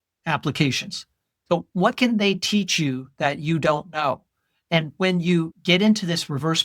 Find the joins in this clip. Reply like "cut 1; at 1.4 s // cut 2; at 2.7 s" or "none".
cut 1; at 5.5 s